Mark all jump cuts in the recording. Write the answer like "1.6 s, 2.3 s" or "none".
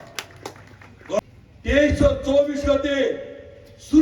1.2 s